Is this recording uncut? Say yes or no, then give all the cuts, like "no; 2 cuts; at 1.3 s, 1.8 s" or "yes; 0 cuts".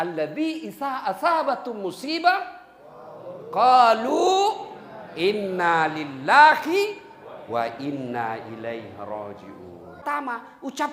no; 1 cut; at 10.0 s